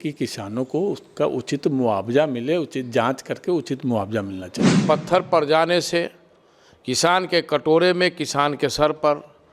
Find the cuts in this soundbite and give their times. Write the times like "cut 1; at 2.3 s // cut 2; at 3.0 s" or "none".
cut 1; at 4.8 s